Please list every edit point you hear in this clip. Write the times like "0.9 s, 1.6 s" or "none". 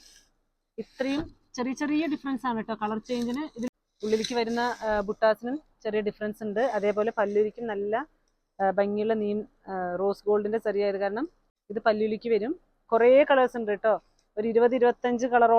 3.7 s, 11.4 s